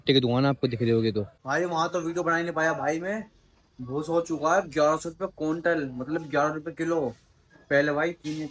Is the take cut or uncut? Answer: cut